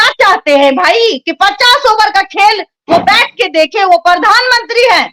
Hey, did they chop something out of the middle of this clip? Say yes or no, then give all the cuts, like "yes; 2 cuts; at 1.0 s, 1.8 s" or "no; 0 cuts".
no; 0 cuts